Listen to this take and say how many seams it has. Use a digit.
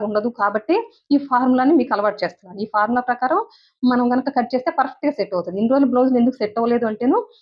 0